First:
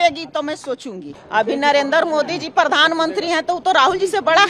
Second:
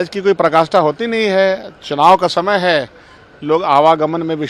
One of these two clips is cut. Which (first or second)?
first